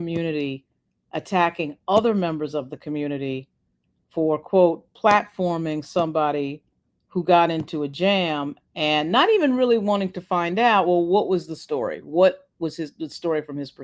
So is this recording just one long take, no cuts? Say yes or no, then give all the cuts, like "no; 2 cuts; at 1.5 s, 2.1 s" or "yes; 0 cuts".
yes; 0 cuts